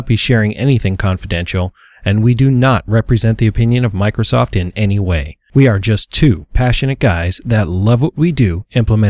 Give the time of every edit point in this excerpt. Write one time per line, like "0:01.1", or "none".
0:05.3